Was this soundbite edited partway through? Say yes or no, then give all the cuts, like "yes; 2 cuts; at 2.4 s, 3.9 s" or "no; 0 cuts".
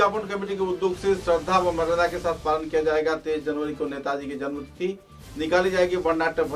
no; 0 cuts